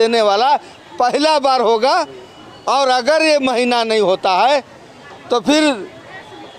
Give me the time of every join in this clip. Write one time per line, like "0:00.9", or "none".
none